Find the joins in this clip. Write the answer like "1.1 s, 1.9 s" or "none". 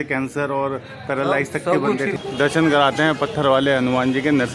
2.2 s